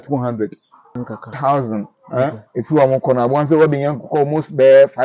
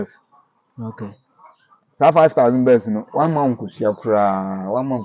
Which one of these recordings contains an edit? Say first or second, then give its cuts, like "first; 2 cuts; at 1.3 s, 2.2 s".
first; 1 cut; at 1.1 s